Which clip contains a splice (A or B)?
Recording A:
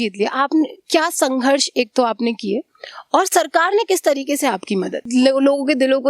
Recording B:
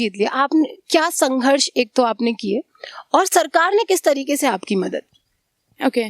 A